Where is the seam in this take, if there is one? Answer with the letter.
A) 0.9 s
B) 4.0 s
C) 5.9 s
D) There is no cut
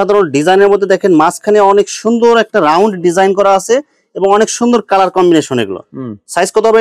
D